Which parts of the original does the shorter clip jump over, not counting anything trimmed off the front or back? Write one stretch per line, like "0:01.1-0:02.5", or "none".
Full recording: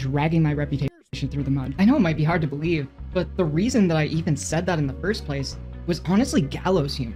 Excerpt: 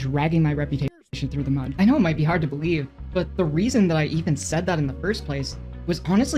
none